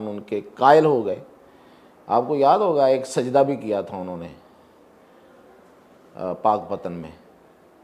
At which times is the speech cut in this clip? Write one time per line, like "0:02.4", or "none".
none